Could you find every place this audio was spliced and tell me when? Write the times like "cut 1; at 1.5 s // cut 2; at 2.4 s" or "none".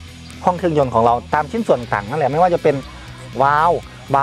none